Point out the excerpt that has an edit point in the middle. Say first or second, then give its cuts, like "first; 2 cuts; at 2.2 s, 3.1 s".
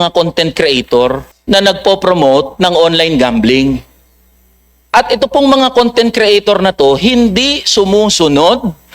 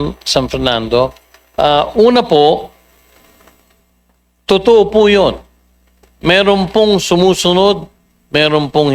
first; 1 cut; at 1.3 s